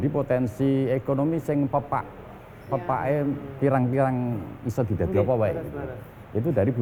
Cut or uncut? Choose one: uncut